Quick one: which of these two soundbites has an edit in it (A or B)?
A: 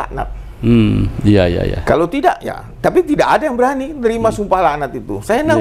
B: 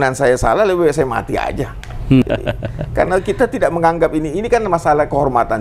B